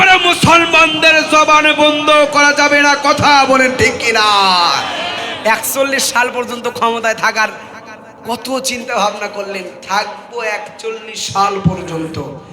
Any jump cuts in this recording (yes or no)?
yes